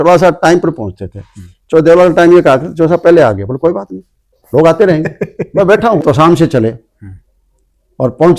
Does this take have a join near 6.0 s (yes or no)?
yes